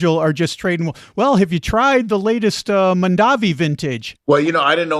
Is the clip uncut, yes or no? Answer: no